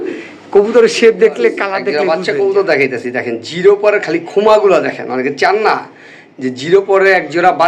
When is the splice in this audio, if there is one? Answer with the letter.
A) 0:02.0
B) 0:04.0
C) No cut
A